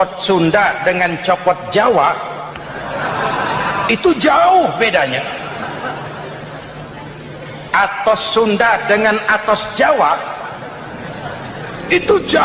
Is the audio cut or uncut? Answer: uncut